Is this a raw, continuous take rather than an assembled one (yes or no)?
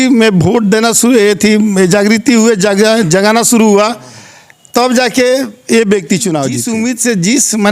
no